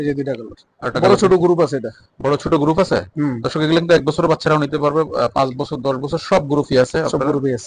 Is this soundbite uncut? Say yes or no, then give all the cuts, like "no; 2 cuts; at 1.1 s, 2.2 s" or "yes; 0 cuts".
yes; 0 cuts